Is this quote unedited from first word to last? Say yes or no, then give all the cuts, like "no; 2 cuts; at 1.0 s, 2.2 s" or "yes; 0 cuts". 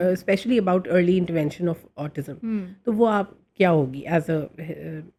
yes; 0 cuts